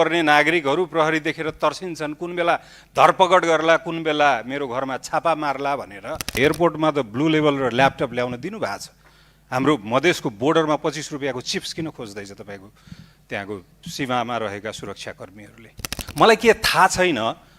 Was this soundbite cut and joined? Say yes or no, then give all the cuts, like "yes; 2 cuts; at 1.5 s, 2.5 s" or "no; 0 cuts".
yes; 2 cuts; at 6.3 s, 16.0 s